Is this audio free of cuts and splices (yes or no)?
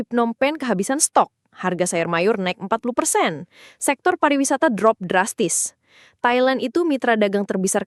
yes